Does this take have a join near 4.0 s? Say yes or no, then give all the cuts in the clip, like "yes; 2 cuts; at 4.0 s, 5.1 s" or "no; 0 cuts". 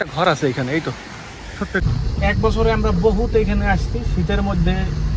no; 1 cut; at 1.9 s